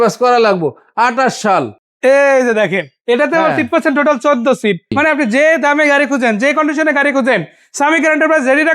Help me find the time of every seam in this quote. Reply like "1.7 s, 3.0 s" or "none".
1.8 s, 4.9 s